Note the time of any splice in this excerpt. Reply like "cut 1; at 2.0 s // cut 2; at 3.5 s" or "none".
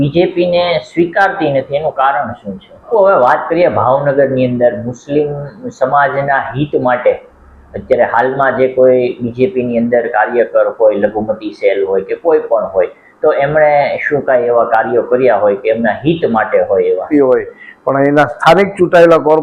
cut 1; at 2.9 s // cut 2; at 17.1 s